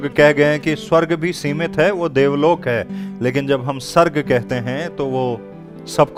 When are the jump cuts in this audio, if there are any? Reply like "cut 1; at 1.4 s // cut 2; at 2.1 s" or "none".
none